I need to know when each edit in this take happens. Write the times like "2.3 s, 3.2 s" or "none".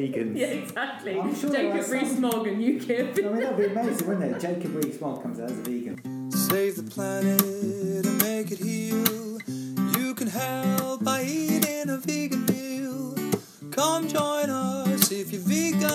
6.2 s